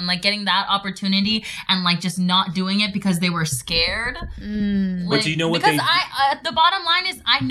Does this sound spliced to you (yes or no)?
no